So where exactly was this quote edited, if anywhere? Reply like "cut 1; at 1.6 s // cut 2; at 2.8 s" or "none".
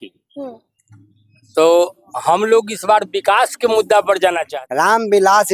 cut 1; at 4.4 s